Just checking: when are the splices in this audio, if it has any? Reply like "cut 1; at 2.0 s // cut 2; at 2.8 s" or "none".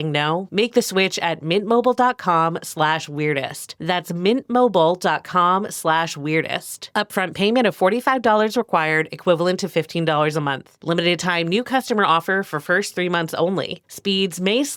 none